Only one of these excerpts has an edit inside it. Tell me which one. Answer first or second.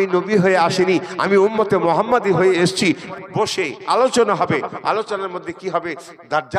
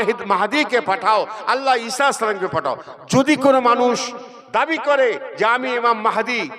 first